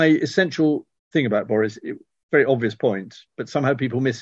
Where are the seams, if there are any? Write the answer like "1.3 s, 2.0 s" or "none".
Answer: 0.9 s